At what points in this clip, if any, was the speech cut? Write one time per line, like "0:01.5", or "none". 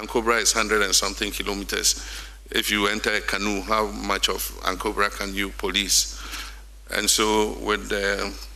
none